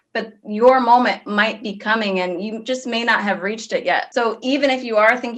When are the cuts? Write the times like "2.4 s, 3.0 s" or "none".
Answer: 4.1 s